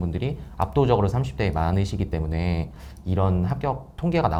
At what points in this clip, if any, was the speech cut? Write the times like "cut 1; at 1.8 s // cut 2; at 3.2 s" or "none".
none